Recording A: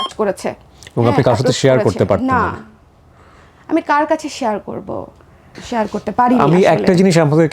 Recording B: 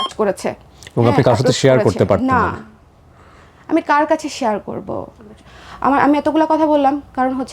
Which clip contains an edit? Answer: B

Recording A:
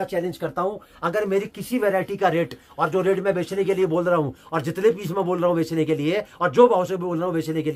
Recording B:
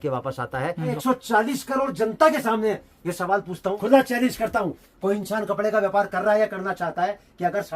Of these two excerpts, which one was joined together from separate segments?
B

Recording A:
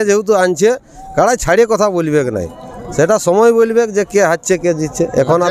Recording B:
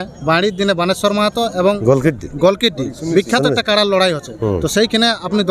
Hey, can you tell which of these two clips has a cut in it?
B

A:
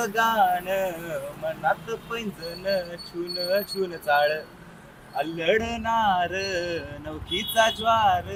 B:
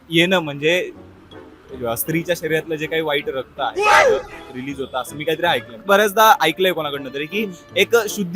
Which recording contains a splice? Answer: B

